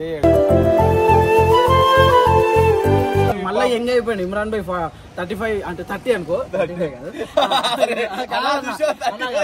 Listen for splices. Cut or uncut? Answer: cut